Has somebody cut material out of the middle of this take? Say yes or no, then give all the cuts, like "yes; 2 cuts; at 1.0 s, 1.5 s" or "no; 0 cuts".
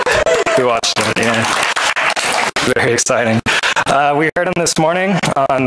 yes; 1 cut; at 1.2 s